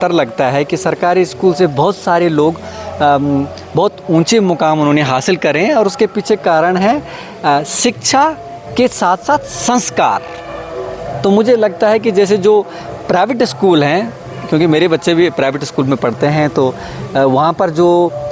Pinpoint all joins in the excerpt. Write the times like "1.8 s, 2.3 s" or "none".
none